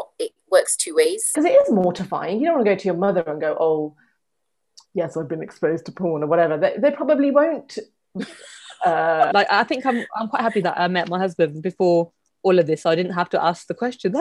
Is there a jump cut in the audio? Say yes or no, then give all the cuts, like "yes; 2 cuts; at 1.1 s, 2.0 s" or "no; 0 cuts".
yes; 2 cuts; at 1.2 s, 9.3 s